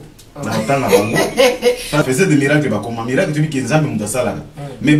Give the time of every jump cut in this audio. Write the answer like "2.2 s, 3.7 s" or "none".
2.0 s